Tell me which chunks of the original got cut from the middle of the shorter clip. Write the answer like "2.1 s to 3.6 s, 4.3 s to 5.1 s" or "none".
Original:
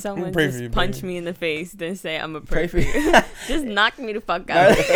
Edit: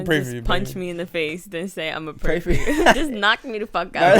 3.3 s to 3.5 s

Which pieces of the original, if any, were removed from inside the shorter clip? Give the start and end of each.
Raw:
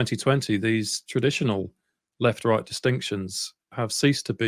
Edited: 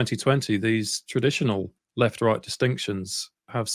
1.8 s to 2.0 s

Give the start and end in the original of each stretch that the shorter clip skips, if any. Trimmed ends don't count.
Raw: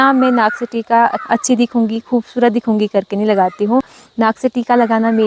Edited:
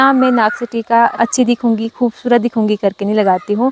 1.1 s to 1.2 s

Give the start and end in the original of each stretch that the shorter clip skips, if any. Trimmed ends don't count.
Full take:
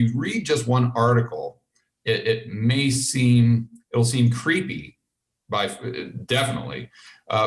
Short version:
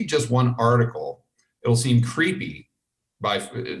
1.8 s to 3.8 s

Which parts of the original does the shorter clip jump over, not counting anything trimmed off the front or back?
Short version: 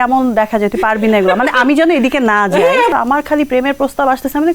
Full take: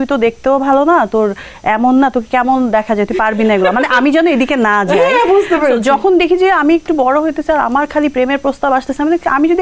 5.3 s to 7.6 s

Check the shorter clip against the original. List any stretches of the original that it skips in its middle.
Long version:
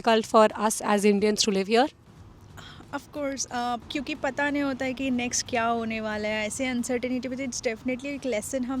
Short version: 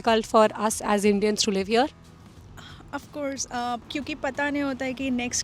none

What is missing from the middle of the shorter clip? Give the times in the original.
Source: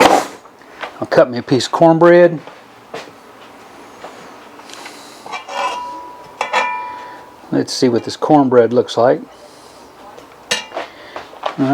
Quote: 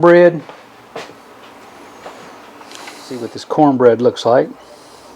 5.3 s to 8.1 s

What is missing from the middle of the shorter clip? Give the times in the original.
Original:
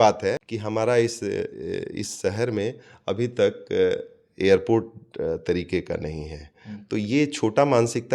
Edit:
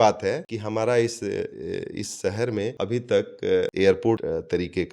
2.7 s to 3.0 s, 4.0 s to 4.3 s, 4.8 s to 5.2 s

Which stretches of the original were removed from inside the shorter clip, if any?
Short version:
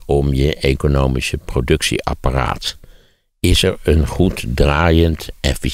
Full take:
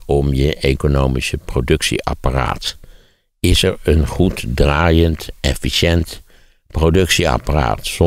none

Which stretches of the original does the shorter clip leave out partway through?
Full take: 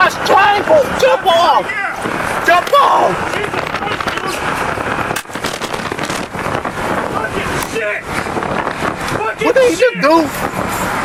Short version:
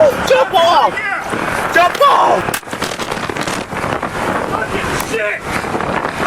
3.2 s to 5.1 s

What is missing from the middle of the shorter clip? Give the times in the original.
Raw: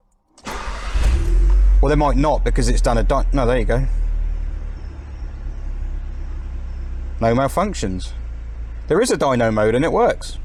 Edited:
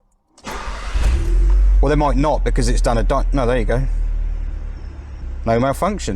5.2 s to 6.9 s

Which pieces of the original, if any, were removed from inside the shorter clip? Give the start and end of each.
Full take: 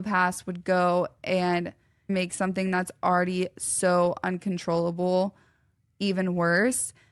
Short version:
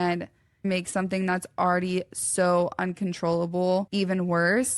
5.3 s to 6.0 s

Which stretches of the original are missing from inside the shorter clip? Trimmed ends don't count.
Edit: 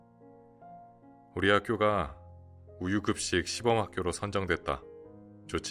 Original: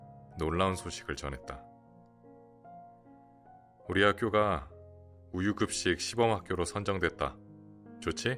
3.4 s to 3.9 s

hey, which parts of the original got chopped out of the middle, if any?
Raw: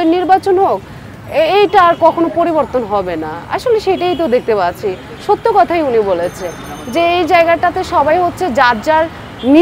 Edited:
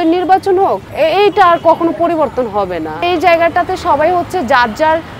0.8 s to 1.2 s, 3.4 s to 7.1 s

